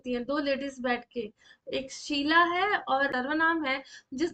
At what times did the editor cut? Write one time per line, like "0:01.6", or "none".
0:03.1